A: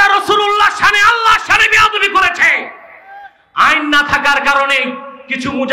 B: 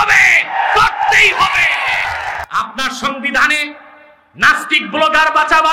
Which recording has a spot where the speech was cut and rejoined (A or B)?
B